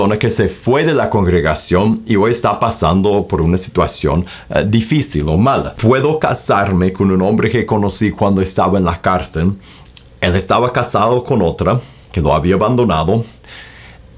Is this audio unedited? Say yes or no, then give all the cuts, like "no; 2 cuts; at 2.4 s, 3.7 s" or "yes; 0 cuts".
no; 1 cut; at 5.7 s